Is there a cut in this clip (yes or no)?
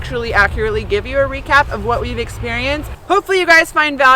yes